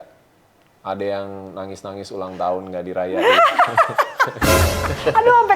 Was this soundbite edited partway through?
no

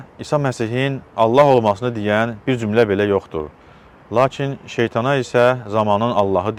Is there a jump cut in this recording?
no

